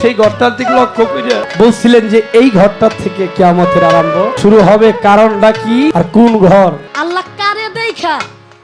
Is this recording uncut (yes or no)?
no